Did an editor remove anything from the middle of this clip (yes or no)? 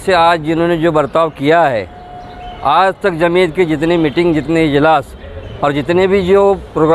no